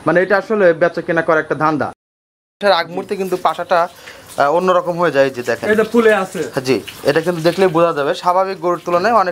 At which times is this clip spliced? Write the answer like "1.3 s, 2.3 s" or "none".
2.2 s